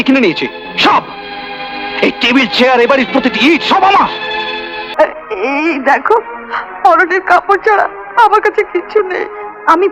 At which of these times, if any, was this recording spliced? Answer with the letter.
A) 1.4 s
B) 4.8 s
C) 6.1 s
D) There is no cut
B